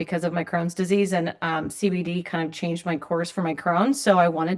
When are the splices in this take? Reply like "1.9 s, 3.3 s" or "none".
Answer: none